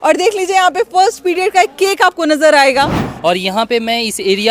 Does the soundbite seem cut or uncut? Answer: cut